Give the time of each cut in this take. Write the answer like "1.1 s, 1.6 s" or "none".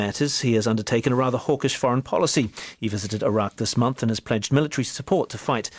4.2 s